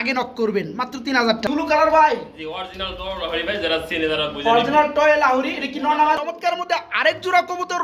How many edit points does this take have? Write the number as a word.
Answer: two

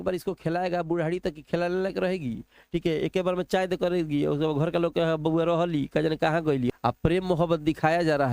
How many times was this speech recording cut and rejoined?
one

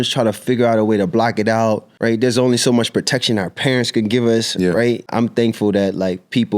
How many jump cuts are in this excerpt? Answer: two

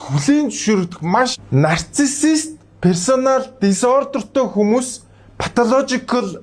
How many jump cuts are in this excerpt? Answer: one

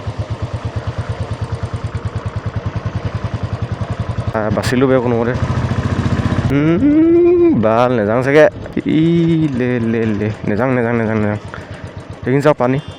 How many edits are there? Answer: three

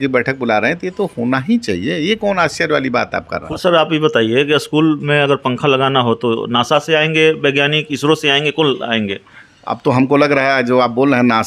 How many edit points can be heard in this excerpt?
one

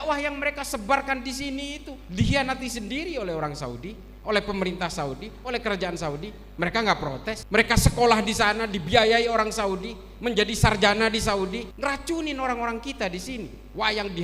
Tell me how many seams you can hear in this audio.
two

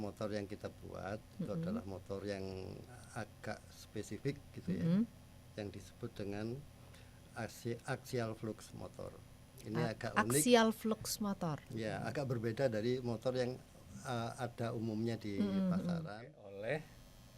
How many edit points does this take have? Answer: one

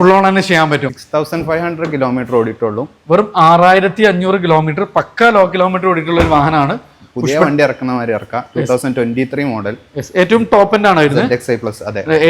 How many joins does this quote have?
one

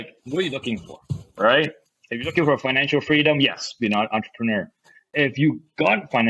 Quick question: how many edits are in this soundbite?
one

